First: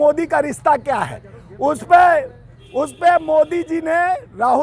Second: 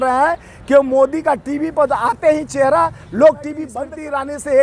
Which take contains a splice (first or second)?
second